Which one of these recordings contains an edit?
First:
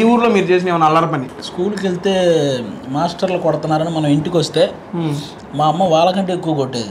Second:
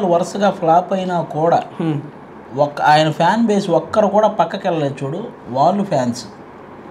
first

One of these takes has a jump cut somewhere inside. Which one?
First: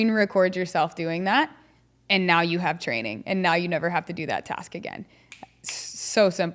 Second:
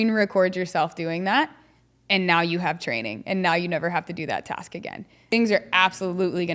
second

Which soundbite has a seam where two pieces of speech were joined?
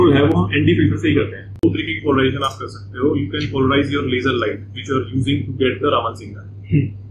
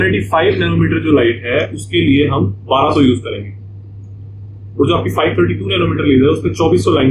first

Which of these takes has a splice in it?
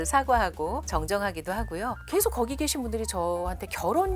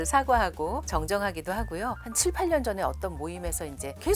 first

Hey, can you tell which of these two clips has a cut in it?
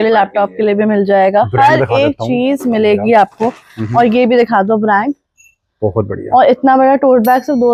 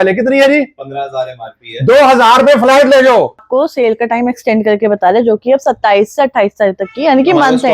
second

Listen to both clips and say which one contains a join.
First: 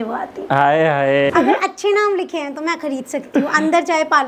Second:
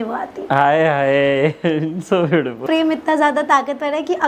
first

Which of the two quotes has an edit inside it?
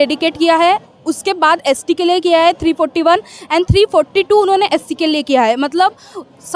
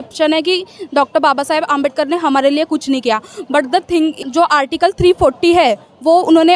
second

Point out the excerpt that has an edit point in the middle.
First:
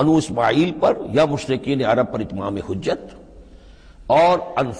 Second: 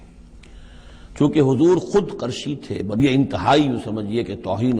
second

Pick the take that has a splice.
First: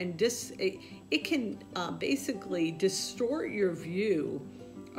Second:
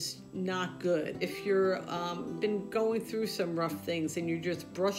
second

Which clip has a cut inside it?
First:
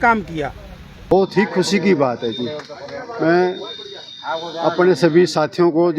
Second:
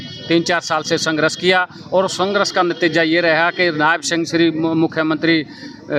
first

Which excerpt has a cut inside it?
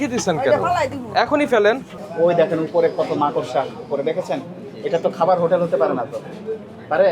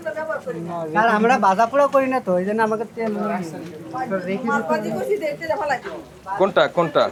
first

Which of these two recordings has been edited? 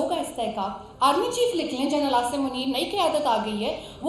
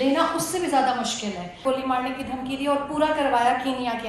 second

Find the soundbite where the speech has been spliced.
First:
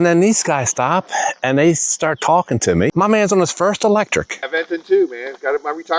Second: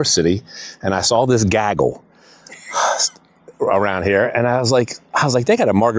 first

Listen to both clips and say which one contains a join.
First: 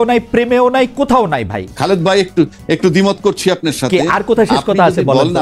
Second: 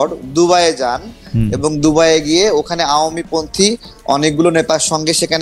first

